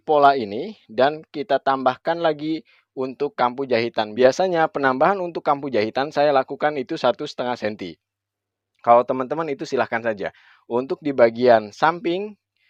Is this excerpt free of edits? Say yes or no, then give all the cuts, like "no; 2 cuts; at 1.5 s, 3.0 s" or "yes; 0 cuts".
yes; 0 cuts